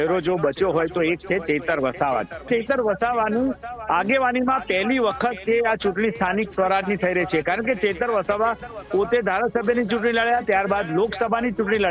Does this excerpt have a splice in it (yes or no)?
yes